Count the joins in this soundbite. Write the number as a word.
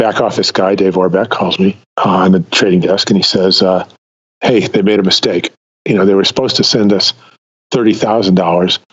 one